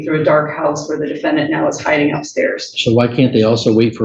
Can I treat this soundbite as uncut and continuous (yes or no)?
yes